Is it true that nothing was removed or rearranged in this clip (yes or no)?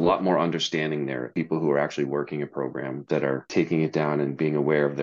no